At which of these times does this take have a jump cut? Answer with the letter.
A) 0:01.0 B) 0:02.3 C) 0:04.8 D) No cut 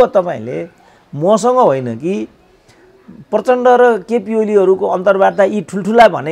D